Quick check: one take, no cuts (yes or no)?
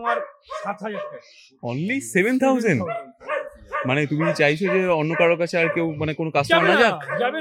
yes